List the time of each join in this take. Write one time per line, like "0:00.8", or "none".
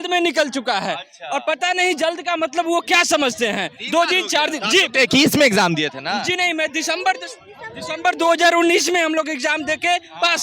none